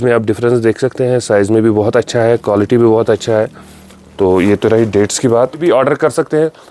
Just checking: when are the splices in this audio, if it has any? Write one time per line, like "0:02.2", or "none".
0:05.6